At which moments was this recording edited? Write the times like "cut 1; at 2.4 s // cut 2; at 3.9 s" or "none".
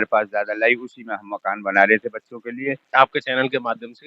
cut 1; at 2.9 s